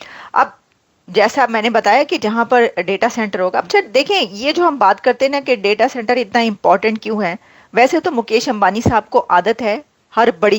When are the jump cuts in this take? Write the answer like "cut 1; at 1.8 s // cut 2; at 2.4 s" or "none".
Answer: none